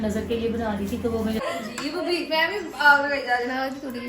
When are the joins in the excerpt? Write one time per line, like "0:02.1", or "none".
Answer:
0:01.4